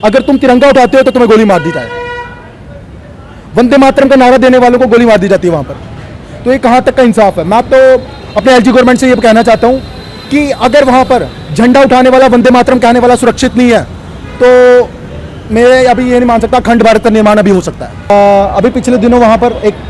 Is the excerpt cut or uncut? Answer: cut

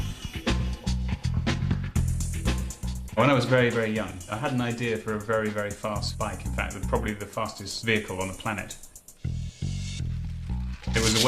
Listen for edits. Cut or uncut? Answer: uncut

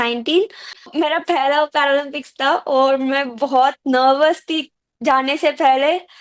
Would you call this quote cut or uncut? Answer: cut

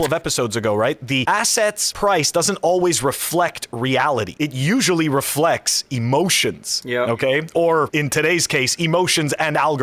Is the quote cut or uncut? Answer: uncut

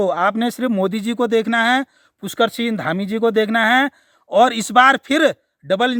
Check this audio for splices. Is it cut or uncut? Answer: uncut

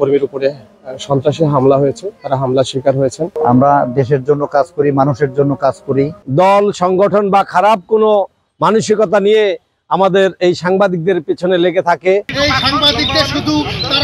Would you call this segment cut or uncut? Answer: cut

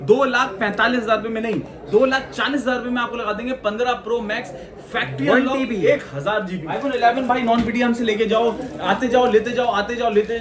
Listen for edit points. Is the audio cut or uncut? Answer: cut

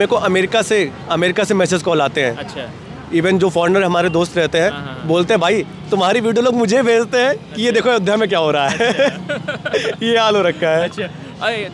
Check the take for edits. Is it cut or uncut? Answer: uncut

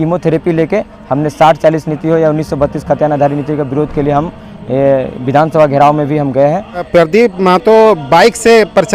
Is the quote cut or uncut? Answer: cut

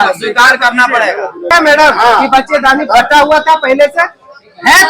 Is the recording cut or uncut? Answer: cut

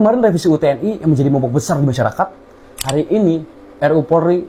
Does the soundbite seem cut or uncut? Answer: uncut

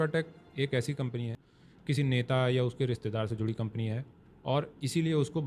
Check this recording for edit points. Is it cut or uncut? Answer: cut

